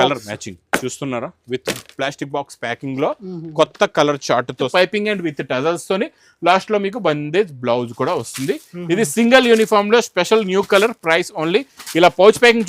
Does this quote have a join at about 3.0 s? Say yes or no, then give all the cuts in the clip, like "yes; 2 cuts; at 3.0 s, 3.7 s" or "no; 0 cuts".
no; 1 cut; at 4.7 s